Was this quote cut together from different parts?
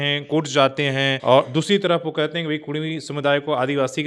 no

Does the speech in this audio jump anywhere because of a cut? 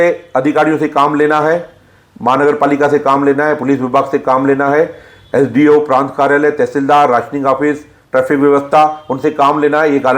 no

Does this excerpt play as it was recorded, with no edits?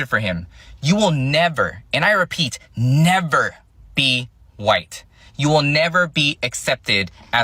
yes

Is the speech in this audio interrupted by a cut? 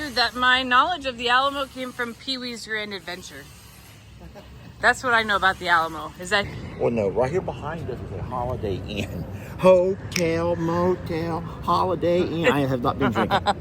yes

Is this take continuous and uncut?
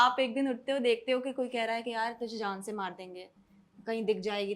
yes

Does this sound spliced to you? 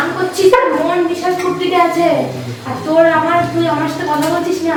no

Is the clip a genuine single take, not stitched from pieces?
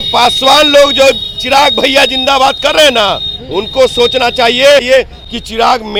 yes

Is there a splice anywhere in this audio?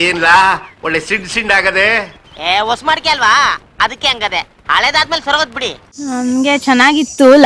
yes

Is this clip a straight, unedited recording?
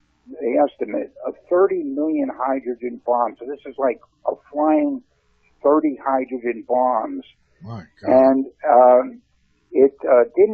no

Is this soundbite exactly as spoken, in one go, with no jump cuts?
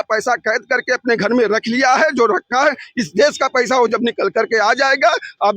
yes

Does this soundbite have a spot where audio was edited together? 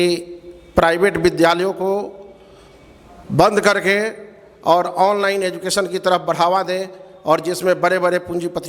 no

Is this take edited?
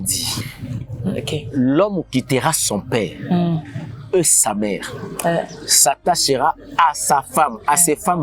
no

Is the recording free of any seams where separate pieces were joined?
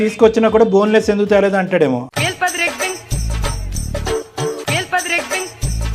yes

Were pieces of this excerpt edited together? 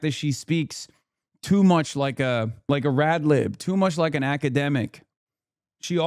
yes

